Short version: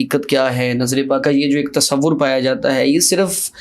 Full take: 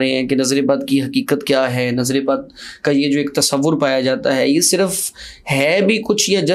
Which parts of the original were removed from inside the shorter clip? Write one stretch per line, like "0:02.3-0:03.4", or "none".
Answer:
0:02.4-0:02.8